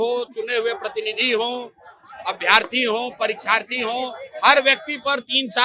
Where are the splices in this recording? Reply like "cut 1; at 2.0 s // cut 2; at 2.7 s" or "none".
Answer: none